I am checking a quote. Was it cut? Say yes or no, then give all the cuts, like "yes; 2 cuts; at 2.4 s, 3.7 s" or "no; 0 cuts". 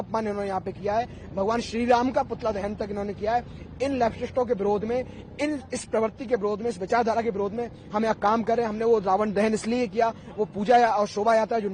no; 0 cuts